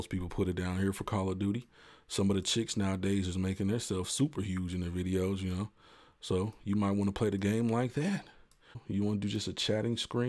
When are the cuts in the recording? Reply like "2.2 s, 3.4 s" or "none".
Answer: 8.8 s